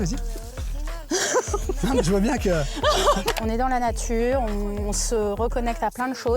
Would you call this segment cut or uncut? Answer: cut